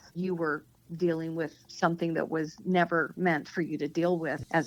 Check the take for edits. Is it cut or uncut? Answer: uncut